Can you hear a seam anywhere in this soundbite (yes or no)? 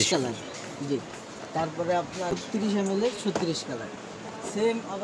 yes